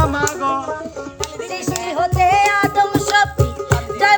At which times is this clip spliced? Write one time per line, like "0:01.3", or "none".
0:01.2